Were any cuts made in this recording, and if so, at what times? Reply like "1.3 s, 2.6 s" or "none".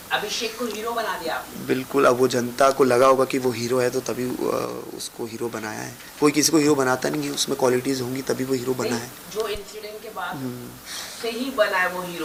none